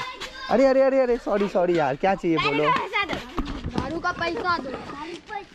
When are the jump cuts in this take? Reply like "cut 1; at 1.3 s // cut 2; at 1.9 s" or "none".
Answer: none